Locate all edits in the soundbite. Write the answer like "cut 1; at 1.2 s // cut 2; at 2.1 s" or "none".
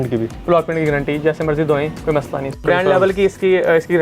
cut 1; at 2.5 s